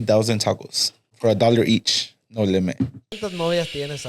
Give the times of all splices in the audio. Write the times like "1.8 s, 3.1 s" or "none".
1.1 s, 3.1 s